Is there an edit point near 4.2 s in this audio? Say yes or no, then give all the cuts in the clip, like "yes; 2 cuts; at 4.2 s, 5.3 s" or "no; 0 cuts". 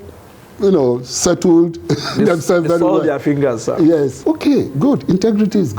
yes; 1 cut; at 4.2 s